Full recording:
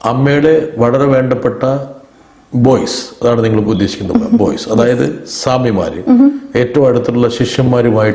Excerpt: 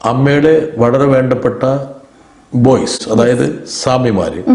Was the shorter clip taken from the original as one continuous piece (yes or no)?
no